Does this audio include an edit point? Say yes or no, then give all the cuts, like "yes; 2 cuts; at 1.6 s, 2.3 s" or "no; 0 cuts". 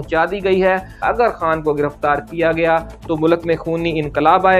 yes; 1 cut; at 1.0 s